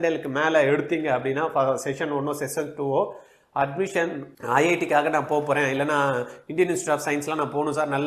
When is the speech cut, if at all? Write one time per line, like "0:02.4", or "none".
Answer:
none